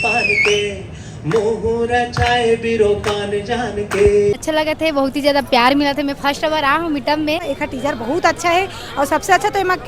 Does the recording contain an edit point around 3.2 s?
no; 2 cuts; at 4.4 s, 7.5 s

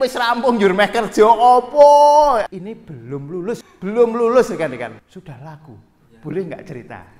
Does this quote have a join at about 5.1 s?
yes; 3 cuts; at 2.5 s, 3.7 s, 5.1 s

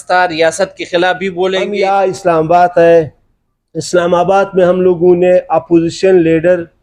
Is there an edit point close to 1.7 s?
yes; 1 cut; at 1.7 s

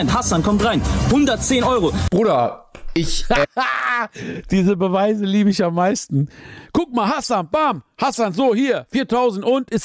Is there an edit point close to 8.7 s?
no; 0 cuts

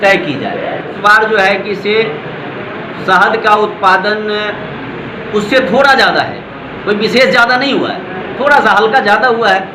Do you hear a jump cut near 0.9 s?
yes; 1 cut; at 0.9 s

